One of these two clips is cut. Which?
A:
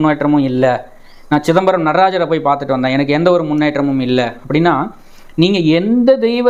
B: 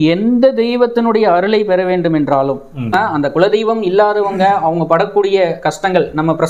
B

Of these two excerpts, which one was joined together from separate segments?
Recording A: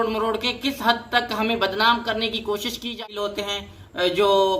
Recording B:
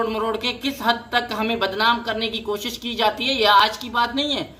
A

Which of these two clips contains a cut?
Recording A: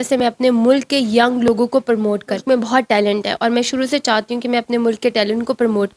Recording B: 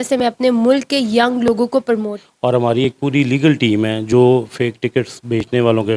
B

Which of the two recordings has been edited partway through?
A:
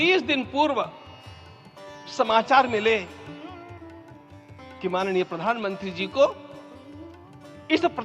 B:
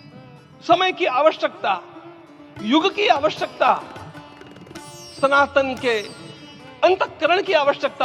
A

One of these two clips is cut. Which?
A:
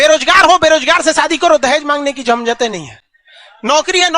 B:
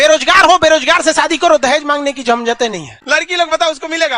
B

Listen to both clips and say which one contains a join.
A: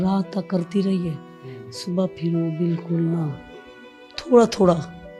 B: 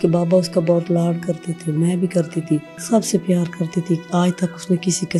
B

